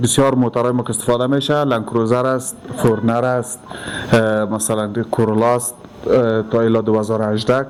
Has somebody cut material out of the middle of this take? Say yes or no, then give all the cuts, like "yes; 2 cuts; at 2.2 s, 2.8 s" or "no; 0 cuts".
no; 0 cuts